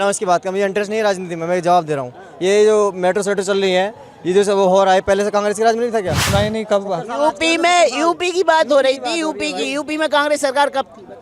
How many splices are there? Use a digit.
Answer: 1